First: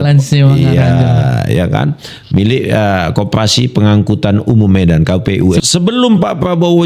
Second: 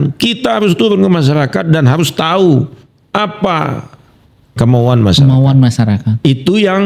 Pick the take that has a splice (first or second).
first